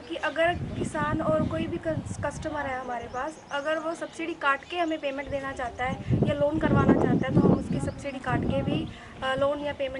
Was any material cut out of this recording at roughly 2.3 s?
no; 0 cuts

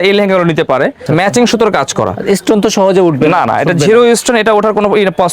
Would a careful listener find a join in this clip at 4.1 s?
no; 1 cut; at 1.0 s

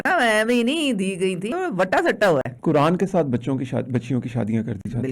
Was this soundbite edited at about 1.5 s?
yes; 2 cuts; at 1.5 s, 2.5 s

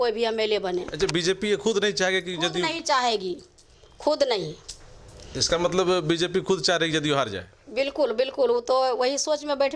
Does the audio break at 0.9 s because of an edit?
no; 0 cuts

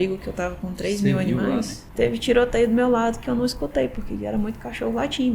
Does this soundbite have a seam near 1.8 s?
yes; 1 cut; at 1.8 s

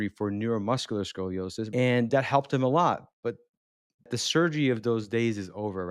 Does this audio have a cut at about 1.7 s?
yes; 2 cuts; at 1.7 s, 4.1 s

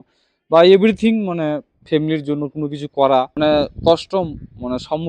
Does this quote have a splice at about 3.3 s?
yes; 1 cut; at 3.3 s

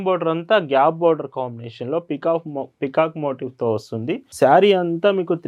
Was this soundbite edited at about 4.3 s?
yes; 1 cut; at 4.3 s

